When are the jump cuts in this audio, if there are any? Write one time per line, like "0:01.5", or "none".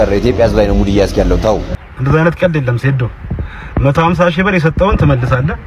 0:01.7